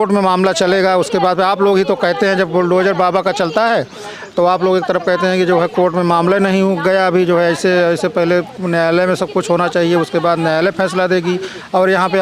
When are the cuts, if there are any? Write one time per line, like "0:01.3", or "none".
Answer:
none